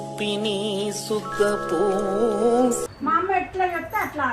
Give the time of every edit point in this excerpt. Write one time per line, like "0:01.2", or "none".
0:02.9